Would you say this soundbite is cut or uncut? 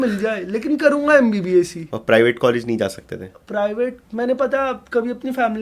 uncut